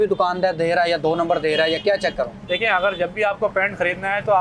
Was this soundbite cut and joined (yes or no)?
no